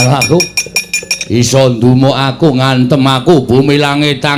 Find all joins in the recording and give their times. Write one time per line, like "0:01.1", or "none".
none